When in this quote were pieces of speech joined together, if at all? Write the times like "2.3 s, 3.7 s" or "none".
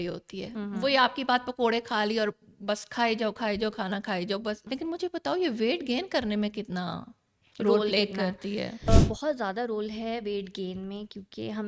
4.6 s, 8.9 s